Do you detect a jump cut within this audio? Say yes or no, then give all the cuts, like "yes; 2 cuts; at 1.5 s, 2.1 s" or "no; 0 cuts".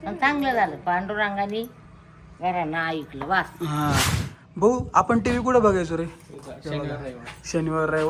yes; 1 cut; at 4.1 s